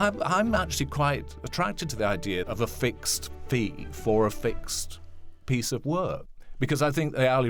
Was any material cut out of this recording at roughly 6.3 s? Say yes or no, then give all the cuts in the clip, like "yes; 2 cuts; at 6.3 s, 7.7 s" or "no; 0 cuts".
yes; 2 cuts; at 2.5 s, 6.3 s